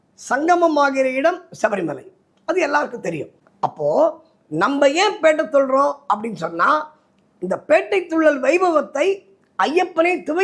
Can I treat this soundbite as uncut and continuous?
yes; 0 cuts

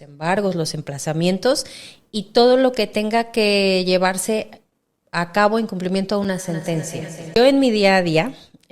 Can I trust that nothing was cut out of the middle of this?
no; 1 cut; at 7.2 s

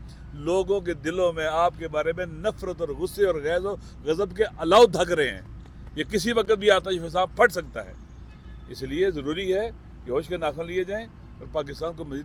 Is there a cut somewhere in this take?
no; 0 cuts

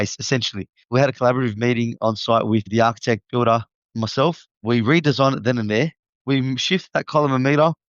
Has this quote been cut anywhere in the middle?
yes; 1 cut; at 6.1 s

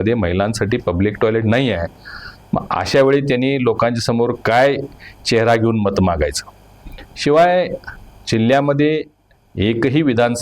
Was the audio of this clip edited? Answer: no; 0 cuts

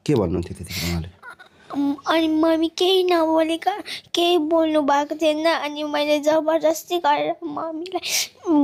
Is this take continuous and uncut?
yes; 0 cuts

